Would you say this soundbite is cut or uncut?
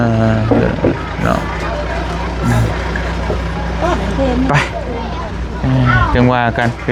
uncut